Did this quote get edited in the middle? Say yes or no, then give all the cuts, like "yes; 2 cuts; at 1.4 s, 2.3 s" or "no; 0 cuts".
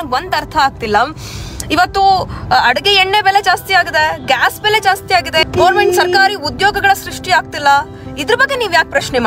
yes; 1 cut; at 5.5 s